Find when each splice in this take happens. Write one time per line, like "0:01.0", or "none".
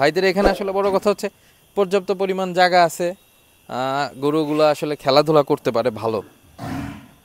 none